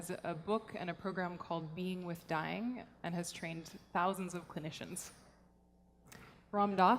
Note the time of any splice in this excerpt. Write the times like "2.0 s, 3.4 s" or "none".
1.7 s